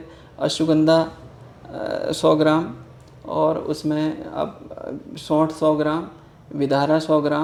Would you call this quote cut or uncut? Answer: uncut